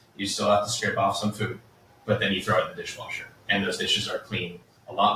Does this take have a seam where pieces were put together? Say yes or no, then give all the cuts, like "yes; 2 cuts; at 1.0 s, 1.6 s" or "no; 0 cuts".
no; 0 cuts